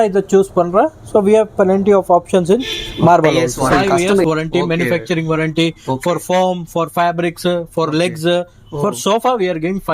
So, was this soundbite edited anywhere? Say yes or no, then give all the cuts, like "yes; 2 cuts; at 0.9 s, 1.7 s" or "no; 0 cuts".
yes; 1 cut; at 4.2 s